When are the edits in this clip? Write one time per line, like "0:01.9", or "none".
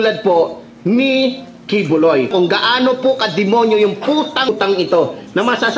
0:02.3
0:04.5